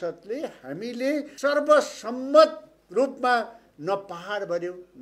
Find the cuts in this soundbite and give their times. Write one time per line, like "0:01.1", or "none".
0:01.3